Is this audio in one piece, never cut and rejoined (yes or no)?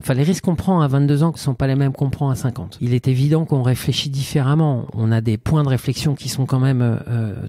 no